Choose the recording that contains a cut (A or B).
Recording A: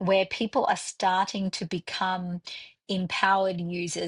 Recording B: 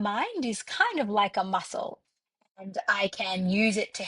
B